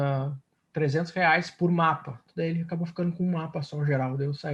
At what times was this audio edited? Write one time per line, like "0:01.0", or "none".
0:02.2